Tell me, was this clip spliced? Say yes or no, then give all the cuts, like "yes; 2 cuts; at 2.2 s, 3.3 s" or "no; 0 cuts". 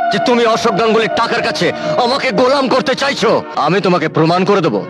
yes; 1 cut; at 3.5 s